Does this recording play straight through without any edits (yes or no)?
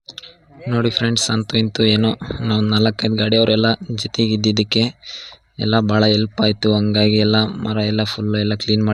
yes